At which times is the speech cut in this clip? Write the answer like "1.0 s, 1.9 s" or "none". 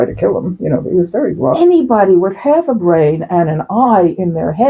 1.6 s